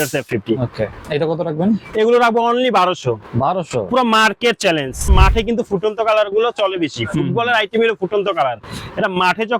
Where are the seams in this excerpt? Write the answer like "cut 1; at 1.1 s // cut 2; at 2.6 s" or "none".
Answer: cut 1; at 1.0 s // cut 2; at 5.1 s